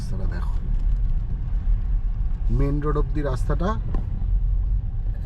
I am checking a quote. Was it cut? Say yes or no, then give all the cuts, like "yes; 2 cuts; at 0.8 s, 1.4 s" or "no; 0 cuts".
no; 0 cuts